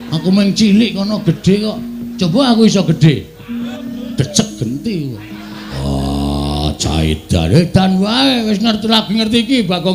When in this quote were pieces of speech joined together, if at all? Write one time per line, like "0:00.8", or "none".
0:03.8
0:05.8